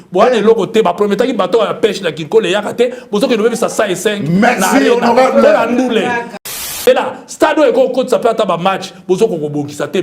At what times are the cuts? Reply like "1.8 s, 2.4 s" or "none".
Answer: 6.6 s